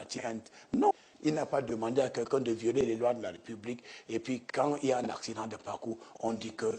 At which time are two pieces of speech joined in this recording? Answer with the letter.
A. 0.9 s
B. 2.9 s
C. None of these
A